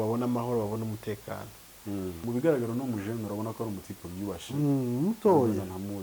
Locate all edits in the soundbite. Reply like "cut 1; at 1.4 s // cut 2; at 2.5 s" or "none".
cut 1; at 2.2 s